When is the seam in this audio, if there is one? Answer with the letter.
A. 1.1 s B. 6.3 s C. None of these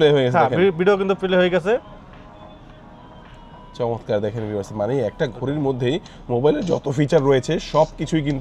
C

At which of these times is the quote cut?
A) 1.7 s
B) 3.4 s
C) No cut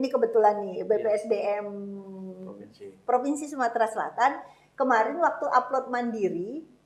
C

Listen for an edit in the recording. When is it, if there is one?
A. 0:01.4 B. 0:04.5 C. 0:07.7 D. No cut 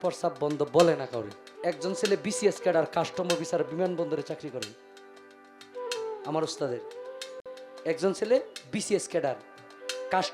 A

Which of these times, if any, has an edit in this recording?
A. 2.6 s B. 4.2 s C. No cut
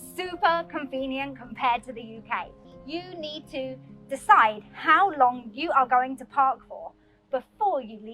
A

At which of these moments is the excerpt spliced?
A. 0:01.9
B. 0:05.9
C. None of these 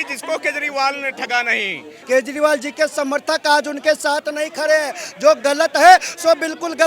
A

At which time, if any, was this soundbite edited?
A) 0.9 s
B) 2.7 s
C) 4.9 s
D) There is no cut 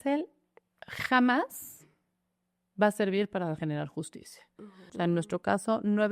C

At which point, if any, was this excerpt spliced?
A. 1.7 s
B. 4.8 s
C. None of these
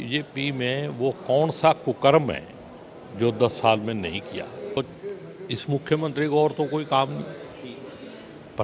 B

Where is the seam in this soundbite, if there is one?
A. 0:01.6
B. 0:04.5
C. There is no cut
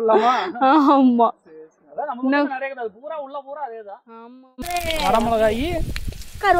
B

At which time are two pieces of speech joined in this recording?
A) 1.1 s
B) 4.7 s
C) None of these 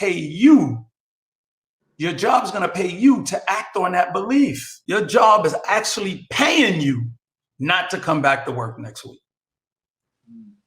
B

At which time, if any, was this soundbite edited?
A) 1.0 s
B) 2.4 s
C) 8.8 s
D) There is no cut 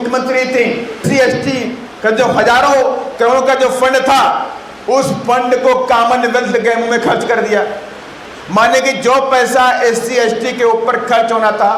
A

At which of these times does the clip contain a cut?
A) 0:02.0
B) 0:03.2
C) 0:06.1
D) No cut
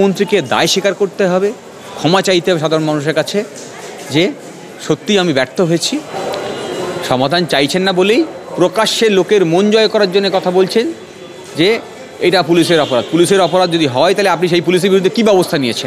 C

